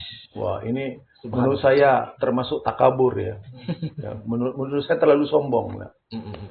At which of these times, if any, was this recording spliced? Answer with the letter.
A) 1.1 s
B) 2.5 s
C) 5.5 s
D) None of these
D